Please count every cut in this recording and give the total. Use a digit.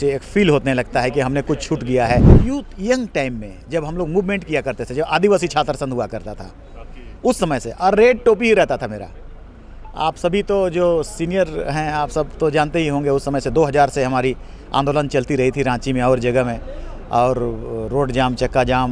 1